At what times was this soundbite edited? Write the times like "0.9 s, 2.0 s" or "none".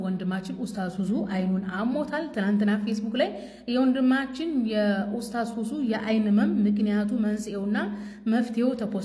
none